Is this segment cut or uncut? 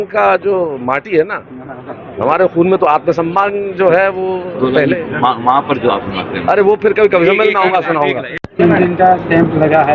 uncut